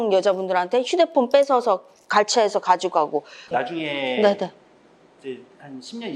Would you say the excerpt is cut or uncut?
cut